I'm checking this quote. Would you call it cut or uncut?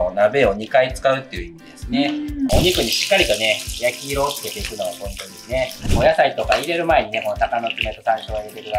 cut